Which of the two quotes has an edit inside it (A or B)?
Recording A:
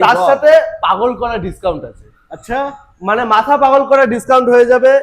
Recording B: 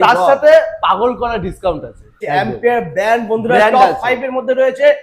B